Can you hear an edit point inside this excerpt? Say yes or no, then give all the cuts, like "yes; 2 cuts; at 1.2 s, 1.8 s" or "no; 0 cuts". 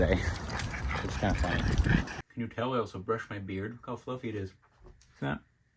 yes; 1 cut; at 2.2 s